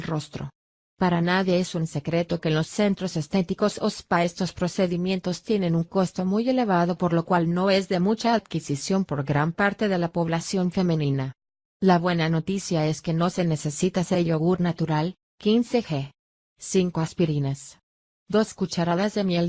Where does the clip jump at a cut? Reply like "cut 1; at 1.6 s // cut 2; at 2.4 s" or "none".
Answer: none